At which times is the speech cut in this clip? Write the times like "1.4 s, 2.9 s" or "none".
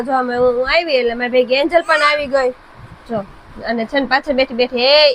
none